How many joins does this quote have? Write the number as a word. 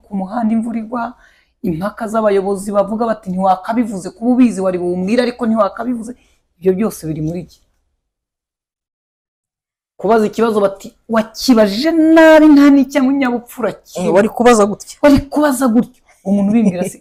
zero